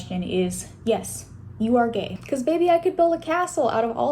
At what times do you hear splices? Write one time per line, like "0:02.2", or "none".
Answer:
0:02.2